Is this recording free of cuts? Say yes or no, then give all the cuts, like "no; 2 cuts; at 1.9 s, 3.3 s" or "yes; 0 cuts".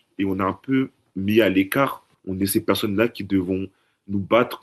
yes; 0 cuts